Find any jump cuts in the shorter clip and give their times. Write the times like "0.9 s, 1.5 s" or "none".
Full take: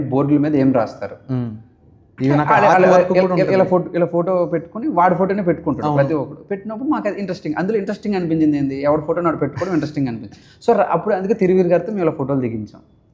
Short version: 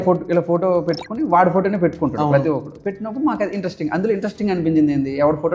none